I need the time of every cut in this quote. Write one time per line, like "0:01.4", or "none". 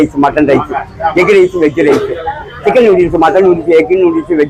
none